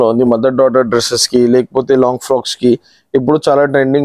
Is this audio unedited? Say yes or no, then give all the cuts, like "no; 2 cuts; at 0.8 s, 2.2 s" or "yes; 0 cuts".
yes; 0 cuts